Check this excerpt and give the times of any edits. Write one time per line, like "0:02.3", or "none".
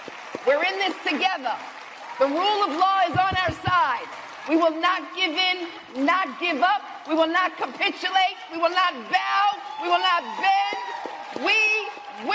none